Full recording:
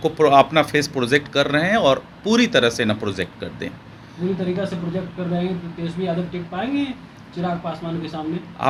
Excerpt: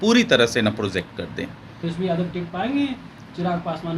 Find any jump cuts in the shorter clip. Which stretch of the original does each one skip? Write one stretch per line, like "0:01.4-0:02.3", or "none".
0:04.0-0:05.7